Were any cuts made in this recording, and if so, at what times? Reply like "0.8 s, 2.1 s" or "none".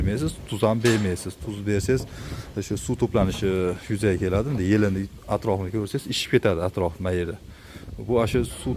none